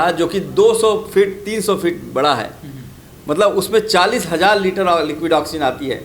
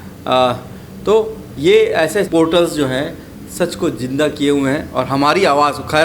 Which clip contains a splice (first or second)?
second